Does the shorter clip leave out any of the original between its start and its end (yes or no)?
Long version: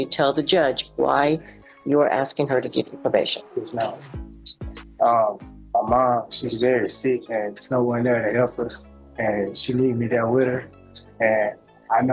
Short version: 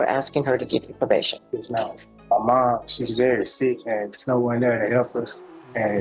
yes